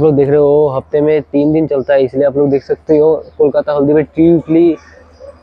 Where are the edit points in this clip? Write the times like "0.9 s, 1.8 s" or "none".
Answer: none